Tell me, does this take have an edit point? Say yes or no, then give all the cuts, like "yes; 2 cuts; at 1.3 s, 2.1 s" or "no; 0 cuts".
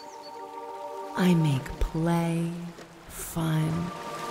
yes; 1 cut; at 1.2 s